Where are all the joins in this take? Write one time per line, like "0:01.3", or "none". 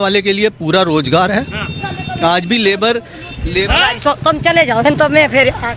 none